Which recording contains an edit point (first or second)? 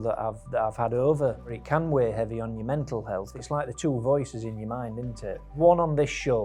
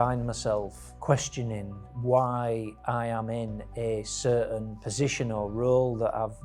first